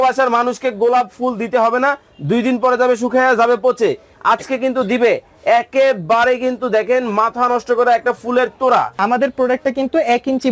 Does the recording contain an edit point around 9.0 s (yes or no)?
yes